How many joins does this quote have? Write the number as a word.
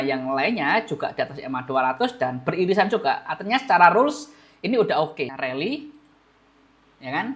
one